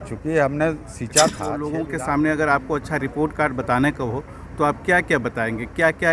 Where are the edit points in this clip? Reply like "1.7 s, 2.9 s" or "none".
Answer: 1.6 s